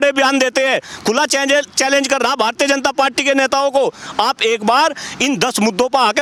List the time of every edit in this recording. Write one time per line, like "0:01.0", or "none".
none